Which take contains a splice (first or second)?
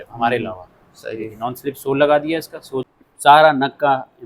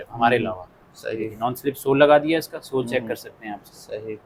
first